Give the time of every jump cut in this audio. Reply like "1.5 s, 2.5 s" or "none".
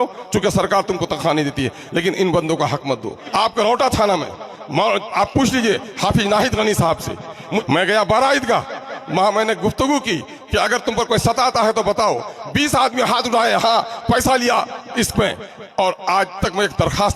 3.2 s, 7.6 s